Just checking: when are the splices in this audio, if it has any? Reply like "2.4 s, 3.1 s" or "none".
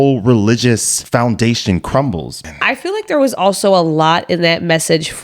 0.9 s, 2.5 s